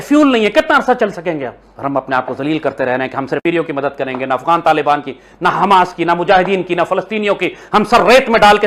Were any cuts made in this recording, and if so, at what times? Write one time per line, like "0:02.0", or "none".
0:03.4